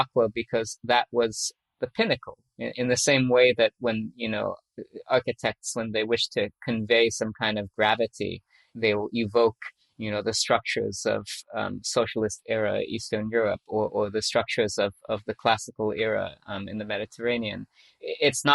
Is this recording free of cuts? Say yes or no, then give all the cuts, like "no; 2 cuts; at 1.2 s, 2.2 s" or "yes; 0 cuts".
no; 4 cuts; at 1.6 s, 2.4 s, 4.7 s, 8.6 s